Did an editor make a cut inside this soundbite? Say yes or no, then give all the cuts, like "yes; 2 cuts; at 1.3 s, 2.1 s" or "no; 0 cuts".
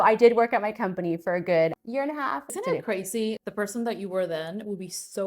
yes; 1 cut; at 2.5 s